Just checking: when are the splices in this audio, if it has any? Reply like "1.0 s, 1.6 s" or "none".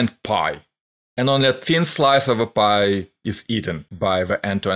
3.8 s